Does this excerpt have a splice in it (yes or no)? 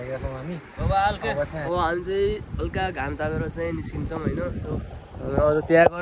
yes